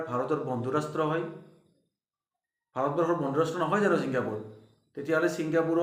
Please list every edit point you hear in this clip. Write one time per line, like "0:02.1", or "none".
none